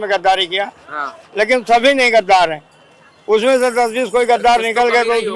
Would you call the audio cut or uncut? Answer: uncut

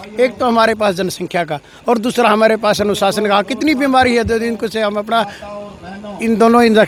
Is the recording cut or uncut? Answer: uncut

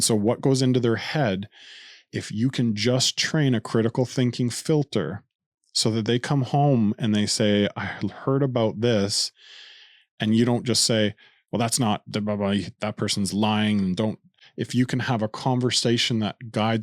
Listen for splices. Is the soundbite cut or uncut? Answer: uncut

